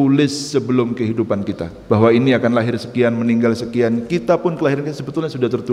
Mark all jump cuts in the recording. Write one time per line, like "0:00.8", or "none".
0:01.7